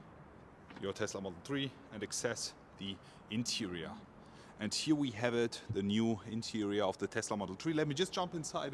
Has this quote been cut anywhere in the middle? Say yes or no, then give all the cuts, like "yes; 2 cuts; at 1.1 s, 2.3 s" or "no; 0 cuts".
no; 0 cuts